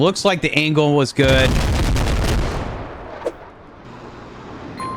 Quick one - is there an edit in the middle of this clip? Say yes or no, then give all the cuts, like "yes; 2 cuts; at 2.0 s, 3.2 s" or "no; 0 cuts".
yes; 1 cut; at 1.5 s